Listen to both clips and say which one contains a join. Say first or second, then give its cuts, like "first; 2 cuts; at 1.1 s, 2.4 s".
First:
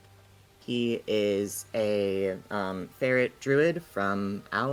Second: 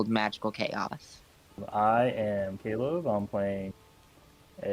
second; 1 cut; at 1.6 s